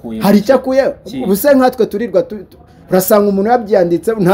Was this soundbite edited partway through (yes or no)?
no